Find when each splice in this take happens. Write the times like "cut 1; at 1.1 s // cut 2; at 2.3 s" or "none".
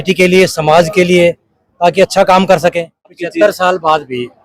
cut 1; at 3.2 s